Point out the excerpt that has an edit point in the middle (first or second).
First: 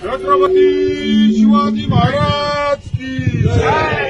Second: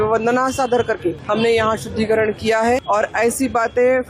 second